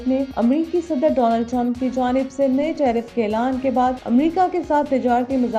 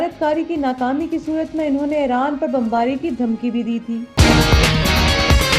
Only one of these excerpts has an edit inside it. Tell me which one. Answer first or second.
second